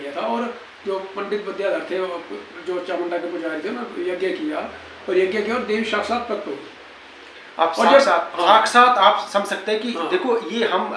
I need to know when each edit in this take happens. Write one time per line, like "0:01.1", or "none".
none